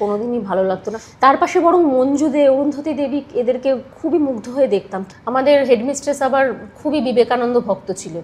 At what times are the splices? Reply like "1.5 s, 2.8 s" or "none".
1.0 s, 4.9 s